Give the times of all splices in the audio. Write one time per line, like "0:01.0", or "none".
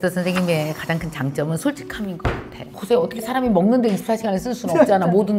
0:02.7